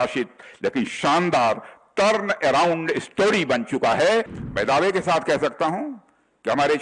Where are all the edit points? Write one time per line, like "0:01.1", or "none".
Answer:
0:04.4

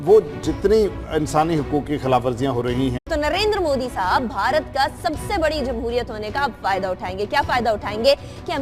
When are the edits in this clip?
none

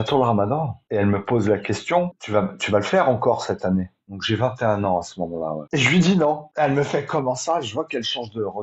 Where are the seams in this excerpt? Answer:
0:05.6

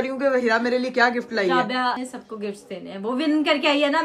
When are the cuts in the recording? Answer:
0:02.0

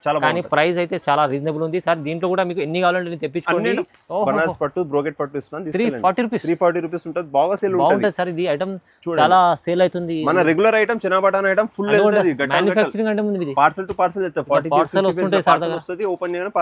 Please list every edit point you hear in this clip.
0:03.8

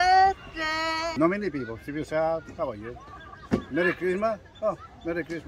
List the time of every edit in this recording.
0:01.1

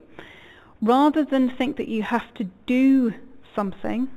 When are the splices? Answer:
0:01.1

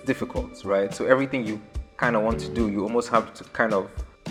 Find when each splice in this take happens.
none

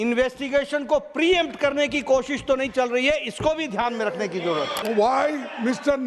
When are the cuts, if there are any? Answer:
0:04.8

